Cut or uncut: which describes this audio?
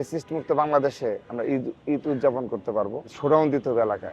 cut